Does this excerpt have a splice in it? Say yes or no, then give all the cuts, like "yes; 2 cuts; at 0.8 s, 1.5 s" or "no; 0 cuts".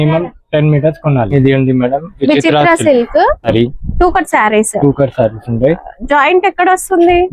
yes; 2 cuts; at 1.3 s, 3.5 s